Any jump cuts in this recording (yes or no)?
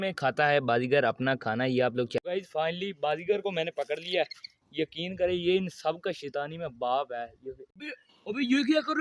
yes